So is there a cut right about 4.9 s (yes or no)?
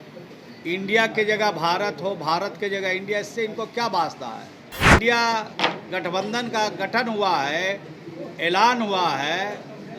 yes